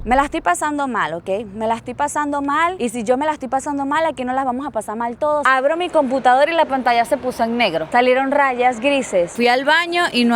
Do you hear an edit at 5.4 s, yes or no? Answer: yes